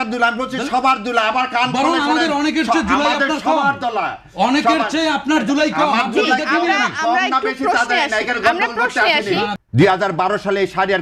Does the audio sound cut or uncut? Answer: cut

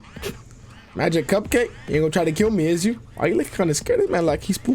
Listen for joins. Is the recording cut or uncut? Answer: cut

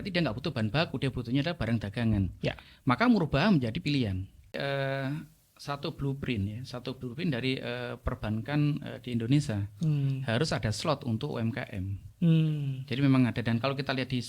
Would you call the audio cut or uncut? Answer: cut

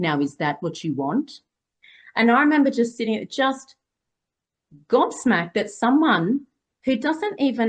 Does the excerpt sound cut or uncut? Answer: uncut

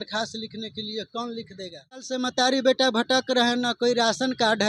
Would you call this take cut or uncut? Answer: cut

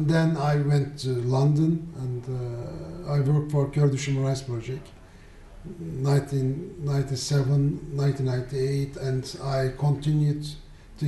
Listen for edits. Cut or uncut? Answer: uncut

